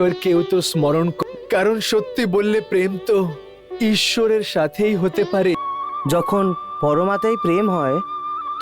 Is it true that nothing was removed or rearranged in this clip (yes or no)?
no